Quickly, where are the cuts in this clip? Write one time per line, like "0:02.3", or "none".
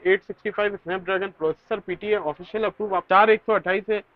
0:03.0